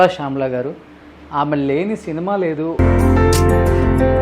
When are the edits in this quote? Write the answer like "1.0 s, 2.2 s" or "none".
2.7 s